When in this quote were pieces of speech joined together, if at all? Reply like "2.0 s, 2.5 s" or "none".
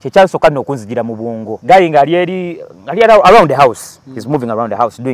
1.5 s